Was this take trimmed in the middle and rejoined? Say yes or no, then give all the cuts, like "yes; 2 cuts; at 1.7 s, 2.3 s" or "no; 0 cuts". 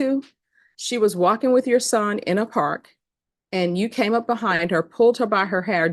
no; 0 cuts